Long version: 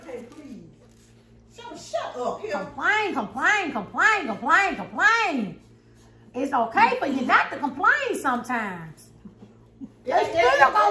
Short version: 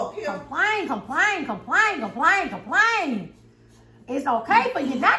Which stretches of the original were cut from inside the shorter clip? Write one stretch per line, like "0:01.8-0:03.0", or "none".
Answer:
none